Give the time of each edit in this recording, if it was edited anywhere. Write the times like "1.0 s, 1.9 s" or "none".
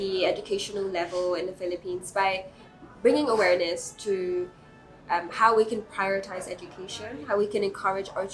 none